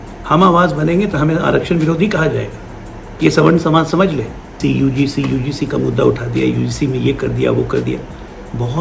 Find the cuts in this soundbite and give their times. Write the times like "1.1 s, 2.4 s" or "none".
4.6 s